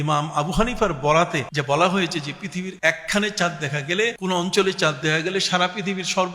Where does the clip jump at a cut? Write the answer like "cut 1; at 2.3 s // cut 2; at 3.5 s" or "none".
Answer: cut 1; at 1.5 s // cut 2; at 2.7 s // cut 3; at 4.2 s